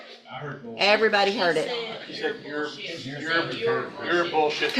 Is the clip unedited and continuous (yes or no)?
yes